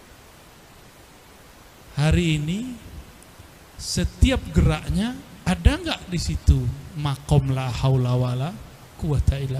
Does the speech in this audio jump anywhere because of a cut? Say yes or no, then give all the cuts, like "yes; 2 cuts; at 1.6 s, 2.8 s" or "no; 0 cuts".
no; 0 cuts